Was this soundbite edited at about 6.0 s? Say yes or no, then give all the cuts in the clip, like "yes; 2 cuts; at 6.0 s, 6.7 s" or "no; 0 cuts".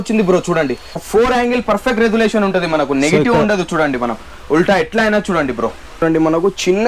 yes; 2 cuts; at 1.0 s, 6.0 s